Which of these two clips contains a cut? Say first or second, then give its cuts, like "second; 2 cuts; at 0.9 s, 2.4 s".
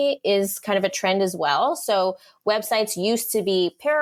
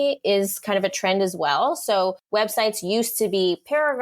second; 1 cut; at 2.2 s